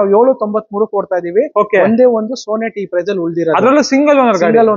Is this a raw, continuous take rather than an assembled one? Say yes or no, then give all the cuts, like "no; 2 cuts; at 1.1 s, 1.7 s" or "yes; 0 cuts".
yes; 0 cuts